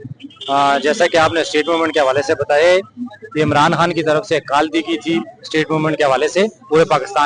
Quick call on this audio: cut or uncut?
uncut